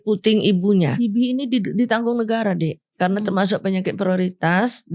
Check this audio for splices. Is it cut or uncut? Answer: cut